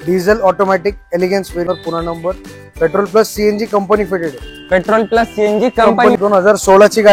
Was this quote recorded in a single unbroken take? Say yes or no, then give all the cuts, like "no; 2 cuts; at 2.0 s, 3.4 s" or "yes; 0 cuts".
no; 2 cuts; at 1.7 s, 6.2 s